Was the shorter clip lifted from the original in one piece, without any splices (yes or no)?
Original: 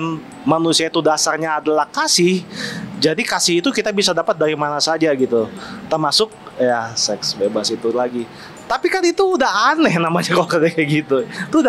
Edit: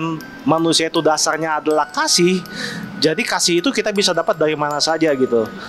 yes